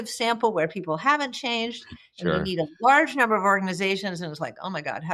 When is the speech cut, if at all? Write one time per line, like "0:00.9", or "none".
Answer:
none